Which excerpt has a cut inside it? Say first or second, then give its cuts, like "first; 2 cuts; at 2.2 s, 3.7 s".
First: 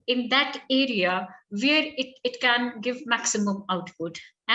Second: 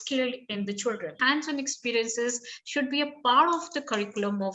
second; 1 cut; at 1.2 s